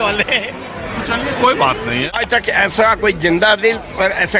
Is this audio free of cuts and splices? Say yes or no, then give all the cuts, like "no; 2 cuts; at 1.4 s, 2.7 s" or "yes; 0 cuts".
no; 1 cut; at 2.2 s